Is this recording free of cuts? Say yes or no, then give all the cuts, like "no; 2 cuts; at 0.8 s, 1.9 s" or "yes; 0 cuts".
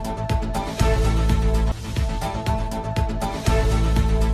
yes; 0 cuts